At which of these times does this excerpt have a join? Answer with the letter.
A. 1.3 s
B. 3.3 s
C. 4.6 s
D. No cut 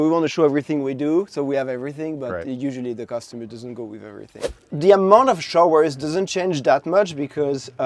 C